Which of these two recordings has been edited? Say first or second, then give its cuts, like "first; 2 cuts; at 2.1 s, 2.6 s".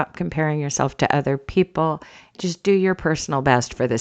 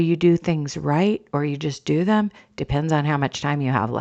first; 1 cut; at 2.3 s